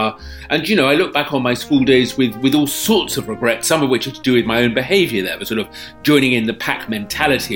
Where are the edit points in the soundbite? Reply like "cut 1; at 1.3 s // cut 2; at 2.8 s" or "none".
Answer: none

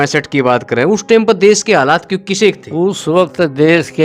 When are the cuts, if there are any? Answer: cut 1; at 2.6 s

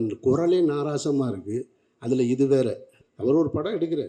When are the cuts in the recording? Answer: cut 1; at 2.9 s

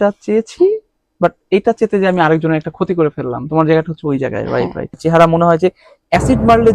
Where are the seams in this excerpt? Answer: cut 1; at 5.0 s

